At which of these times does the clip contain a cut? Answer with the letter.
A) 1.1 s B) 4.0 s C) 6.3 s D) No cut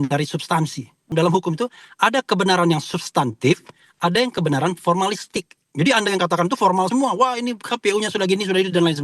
A